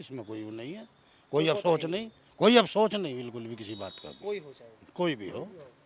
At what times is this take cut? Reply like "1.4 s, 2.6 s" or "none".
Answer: none